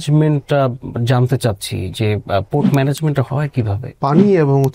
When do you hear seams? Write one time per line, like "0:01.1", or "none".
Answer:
0:03.8